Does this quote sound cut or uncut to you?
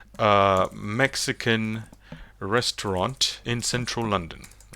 cut